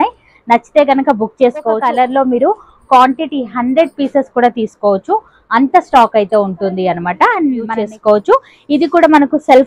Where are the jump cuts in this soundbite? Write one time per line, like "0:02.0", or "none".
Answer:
0:01.8
0:07.7